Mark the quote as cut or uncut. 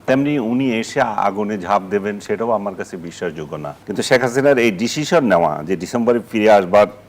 cut